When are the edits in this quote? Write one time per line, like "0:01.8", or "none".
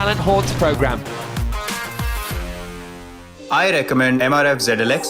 0:03.2